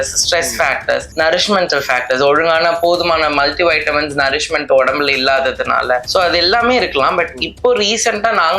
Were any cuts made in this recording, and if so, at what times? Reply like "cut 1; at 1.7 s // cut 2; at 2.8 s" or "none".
cut 1; at 1.1 s // cut 2; at 6.1 s